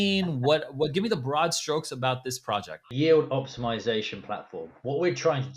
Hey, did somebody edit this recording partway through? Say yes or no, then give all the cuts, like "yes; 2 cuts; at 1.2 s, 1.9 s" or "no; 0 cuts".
yes; 1 cut; at 2.9 s